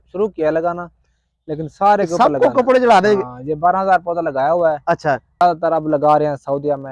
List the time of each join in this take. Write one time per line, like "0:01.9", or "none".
0:05.4

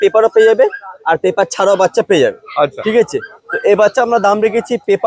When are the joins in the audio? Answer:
none

